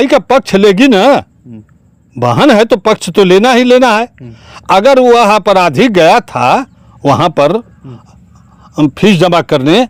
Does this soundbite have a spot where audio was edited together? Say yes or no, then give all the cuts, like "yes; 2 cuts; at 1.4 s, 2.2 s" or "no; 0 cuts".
no; 0 cuts